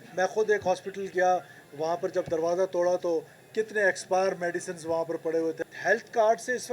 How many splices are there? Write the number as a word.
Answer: one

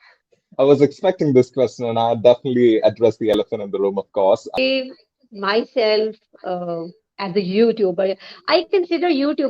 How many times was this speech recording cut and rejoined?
one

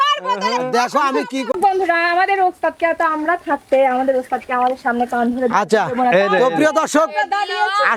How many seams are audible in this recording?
one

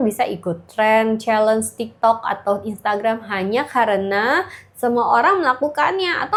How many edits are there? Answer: zero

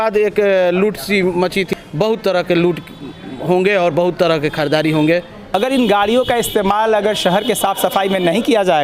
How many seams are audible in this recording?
two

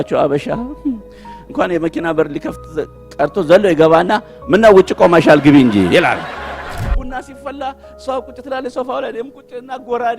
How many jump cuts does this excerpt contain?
one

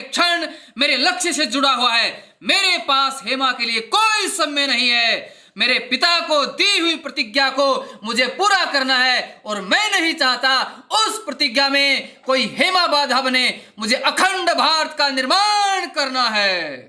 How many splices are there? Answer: zero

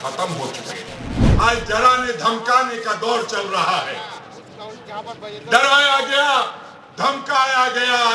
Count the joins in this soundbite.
one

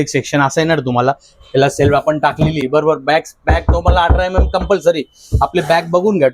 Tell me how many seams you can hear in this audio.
zero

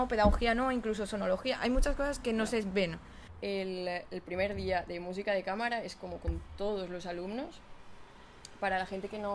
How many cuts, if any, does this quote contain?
one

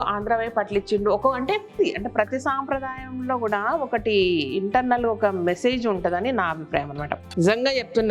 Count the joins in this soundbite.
two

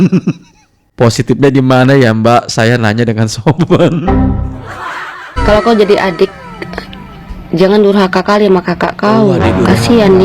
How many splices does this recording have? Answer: one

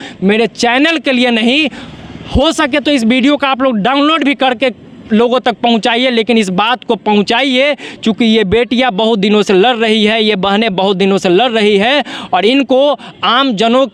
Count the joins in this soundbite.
zero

